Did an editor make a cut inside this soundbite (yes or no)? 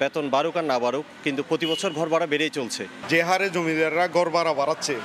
no